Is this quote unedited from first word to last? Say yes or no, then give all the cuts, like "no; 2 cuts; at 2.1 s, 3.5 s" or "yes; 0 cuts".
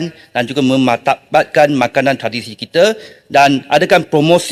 yes; 0 cuts